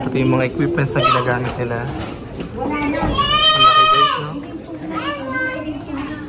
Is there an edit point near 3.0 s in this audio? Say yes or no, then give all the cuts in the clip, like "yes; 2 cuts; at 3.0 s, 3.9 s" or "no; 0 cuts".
no; 0 cuts